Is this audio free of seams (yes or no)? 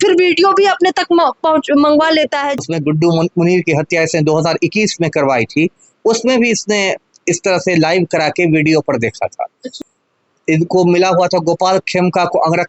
no